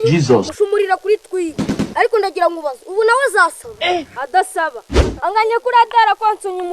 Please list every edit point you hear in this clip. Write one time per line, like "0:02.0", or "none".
none

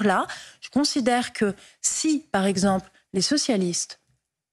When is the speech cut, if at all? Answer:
0:03.4

